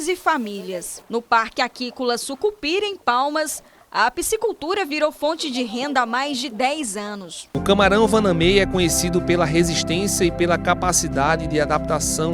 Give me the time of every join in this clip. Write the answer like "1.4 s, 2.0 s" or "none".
7.5 s